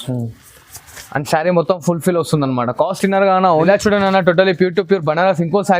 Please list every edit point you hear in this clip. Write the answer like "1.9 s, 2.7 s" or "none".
3.6 s